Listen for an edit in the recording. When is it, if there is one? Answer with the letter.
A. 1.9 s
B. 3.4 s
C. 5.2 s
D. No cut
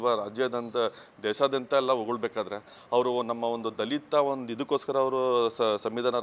D